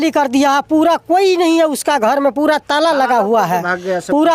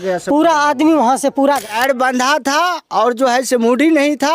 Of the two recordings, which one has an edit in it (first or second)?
second